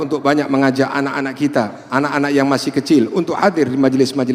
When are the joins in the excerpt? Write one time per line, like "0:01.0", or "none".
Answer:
none